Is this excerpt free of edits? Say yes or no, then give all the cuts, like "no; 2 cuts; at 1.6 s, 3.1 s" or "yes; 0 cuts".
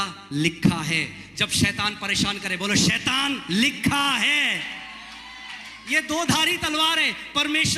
yes; 0 cuts